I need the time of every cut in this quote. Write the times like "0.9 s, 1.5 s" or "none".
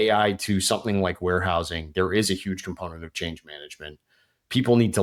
none